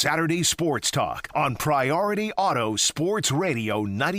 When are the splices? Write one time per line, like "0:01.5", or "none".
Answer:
0:01.2